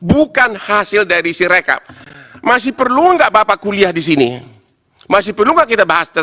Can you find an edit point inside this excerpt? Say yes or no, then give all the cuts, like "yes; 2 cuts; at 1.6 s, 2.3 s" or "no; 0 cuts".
no; 0 cuts